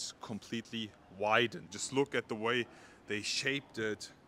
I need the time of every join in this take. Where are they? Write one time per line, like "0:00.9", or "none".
0:01.7